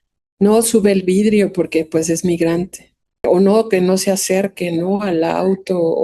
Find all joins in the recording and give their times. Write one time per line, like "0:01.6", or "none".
0:03.2